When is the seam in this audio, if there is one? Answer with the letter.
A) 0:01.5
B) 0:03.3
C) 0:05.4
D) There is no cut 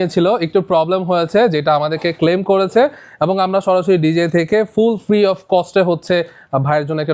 D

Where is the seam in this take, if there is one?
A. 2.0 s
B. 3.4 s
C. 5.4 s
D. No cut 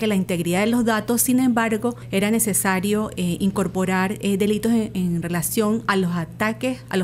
A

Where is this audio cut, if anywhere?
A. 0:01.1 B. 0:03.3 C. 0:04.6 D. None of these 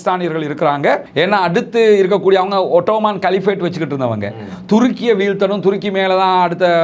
A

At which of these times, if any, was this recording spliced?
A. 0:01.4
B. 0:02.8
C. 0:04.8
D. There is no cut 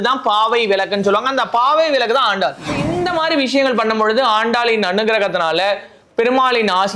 B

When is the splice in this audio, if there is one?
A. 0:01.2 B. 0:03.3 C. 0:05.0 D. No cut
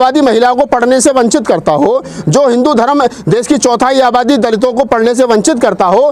D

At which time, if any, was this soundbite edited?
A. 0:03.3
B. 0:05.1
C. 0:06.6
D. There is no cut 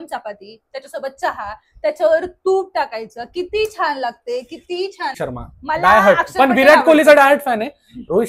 B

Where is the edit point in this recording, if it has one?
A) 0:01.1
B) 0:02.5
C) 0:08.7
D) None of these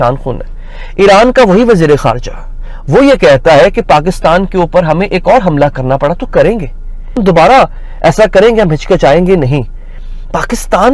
D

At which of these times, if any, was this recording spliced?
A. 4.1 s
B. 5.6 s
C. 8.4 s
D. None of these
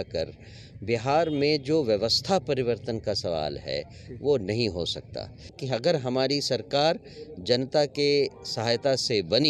B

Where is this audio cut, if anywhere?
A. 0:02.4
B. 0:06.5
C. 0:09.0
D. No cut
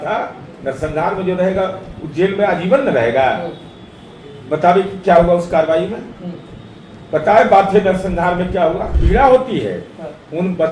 C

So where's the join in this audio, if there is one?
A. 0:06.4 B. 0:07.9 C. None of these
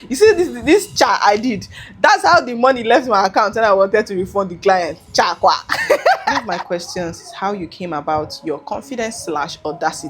A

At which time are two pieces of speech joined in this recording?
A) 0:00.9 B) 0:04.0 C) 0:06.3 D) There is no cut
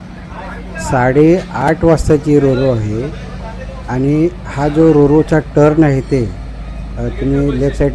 A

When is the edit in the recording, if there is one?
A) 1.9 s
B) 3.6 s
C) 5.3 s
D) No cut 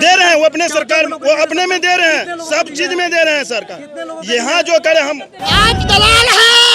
C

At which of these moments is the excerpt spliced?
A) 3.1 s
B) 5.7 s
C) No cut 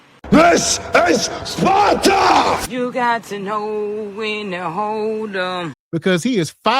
B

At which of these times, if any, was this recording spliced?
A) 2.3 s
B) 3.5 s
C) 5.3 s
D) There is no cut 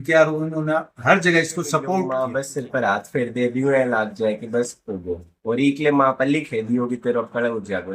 A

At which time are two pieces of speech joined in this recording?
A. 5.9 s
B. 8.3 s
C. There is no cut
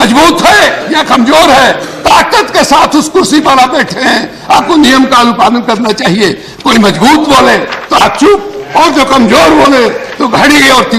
C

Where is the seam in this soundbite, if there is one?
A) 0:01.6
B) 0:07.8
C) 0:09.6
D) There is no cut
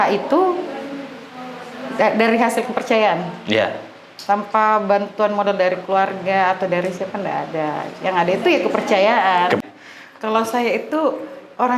C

